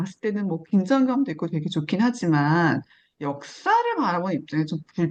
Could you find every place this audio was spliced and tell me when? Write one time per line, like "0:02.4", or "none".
none

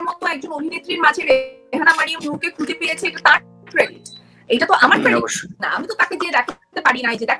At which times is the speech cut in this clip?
none

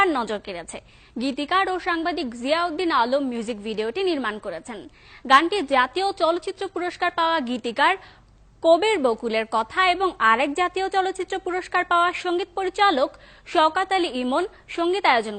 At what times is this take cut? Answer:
0:14.1

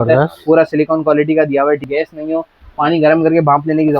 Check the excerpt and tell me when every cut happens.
0:01.9

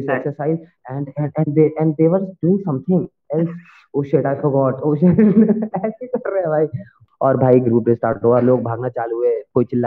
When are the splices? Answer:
0:07.0

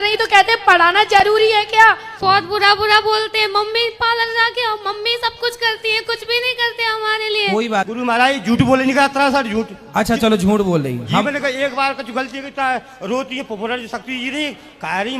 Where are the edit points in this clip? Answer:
0:02.1
0:07.9

